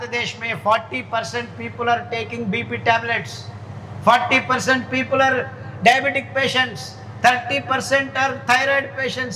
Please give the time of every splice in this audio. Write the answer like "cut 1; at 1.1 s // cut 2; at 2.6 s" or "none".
none